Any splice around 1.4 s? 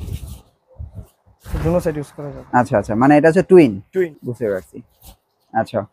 no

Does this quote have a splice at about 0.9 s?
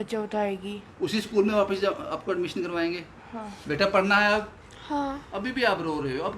no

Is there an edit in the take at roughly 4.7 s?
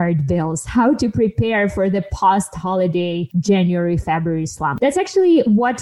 yes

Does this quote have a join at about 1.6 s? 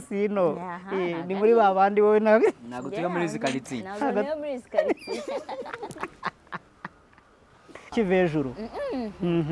no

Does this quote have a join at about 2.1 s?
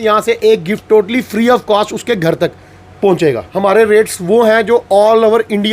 no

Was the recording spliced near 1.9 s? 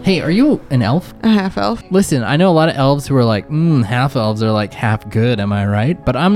yes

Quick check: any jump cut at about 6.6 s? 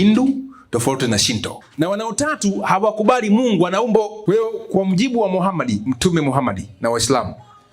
no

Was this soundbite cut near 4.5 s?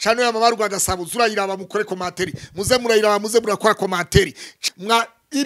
yes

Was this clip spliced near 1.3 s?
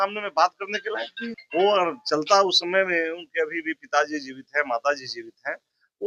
yes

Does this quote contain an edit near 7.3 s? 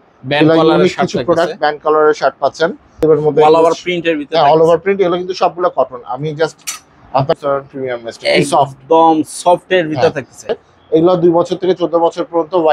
yes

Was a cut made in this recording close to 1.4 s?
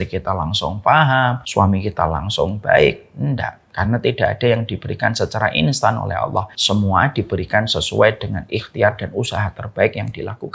yes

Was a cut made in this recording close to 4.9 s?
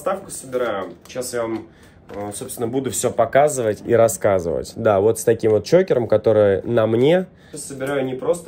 no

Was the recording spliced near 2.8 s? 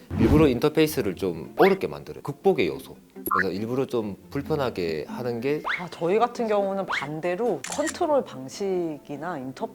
no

